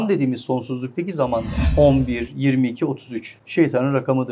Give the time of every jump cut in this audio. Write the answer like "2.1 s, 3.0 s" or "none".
1.6 s